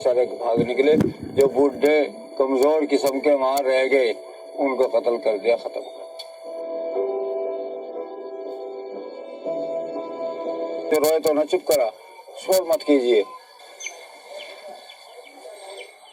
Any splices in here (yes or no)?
yes